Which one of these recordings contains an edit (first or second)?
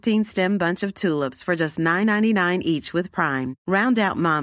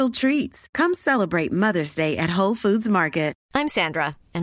second